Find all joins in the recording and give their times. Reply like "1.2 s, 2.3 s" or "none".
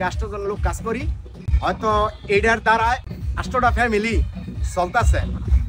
3.2 s